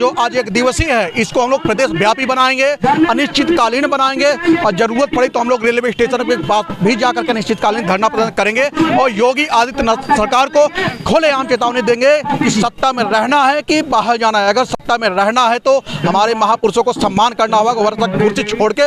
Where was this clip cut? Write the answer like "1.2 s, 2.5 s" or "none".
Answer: none